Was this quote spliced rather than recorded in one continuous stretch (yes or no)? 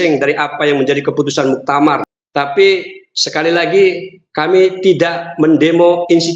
yes